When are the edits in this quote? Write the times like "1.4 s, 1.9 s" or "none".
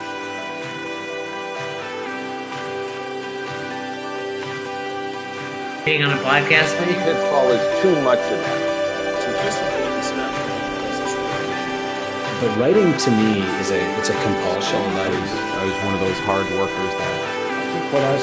5.8 s